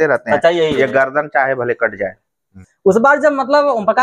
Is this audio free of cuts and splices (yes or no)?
yes